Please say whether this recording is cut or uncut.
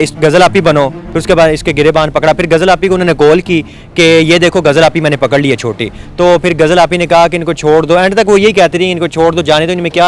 uncut